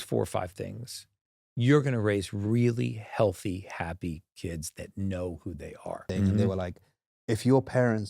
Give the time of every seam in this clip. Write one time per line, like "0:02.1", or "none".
0:06.0